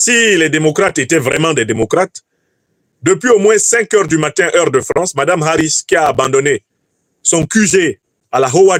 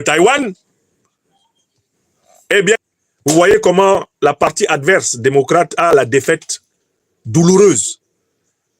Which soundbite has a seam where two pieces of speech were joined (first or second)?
second